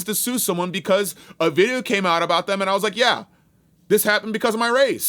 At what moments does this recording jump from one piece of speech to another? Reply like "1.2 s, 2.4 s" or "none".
none